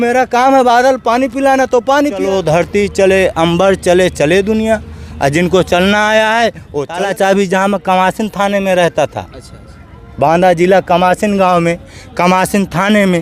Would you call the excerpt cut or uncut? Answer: cut